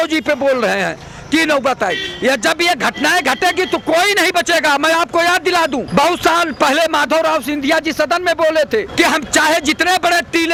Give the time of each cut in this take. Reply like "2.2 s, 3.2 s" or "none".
none